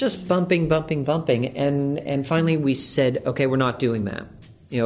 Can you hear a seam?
no; 0 cuts

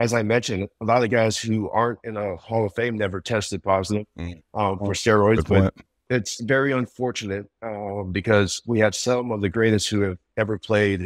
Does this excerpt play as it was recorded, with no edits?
no; 1 cut; at 6.0 s

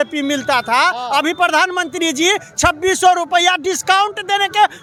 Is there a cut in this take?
no; 0 cuts

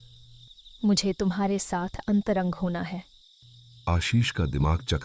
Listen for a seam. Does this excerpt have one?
no; 0 cuts

